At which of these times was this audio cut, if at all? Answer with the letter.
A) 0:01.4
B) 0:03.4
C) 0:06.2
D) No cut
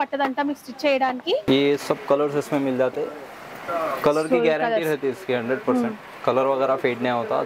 A